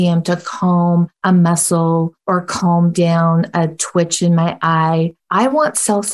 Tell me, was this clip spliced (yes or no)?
yes